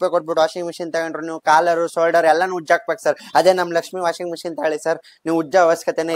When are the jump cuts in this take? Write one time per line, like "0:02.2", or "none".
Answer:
none

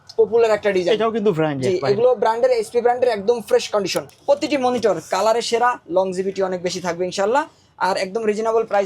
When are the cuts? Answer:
0:04.1

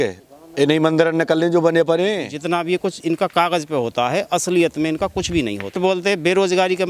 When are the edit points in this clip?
0:02.3
0:05.8

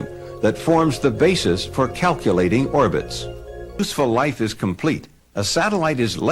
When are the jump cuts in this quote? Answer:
0:03.8

